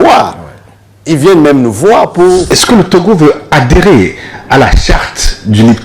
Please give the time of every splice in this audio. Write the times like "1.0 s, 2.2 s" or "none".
2.6 s